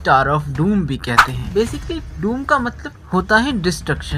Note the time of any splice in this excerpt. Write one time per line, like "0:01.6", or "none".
0:01.4